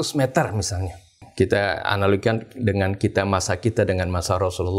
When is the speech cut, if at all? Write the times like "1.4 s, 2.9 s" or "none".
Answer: 1.2 s